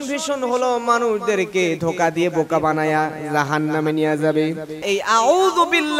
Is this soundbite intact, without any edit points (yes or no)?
no